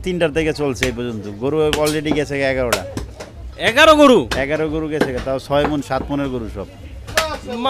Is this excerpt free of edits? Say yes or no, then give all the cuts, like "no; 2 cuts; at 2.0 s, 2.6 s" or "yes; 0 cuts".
yes; 0 cuts